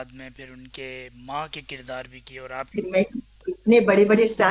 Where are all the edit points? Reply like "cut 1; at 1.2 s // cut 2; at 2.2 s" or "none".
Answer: cut 1; at 2.7 s